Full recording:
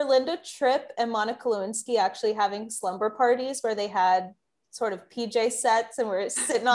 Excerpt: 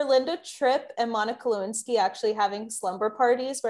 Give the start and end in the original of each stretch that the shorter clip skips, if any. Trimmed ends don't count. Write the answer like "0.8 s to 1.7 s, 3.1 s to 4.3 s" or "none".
none